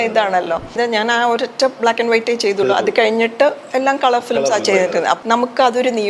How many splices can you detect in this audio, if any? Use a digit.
2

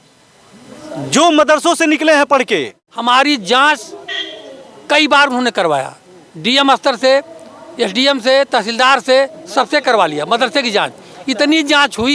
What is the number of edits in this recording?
1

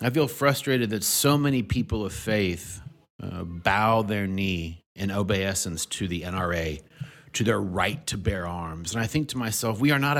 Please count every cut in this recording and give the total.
0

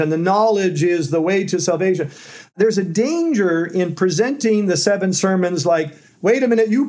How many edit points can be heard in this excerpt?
1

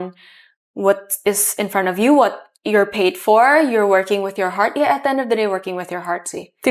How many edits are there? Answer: 0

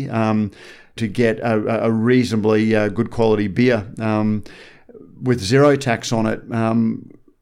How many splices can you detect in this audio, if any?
1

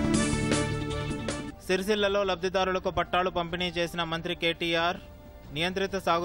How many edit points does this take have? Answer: 1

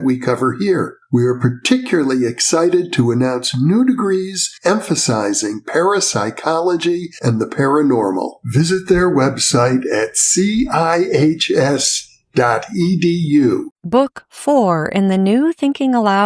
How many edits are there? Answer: 1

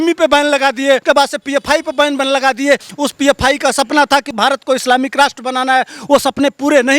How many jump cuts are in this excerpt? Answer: 2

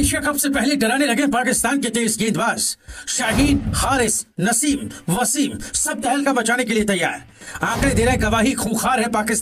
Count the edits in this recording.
0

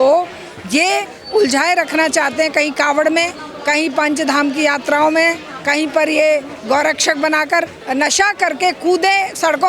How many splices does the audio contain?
1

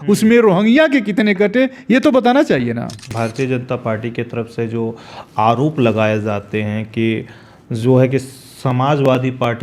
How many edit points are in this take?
1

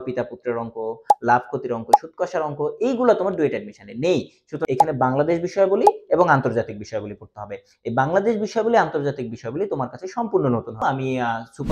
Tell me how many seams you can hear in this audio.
2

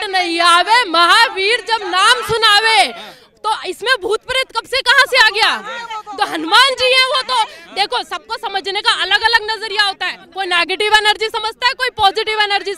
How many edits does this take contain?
0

